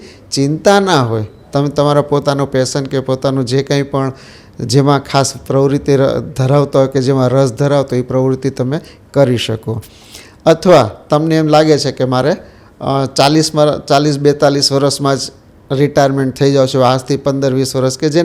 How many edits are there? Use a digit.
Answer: 0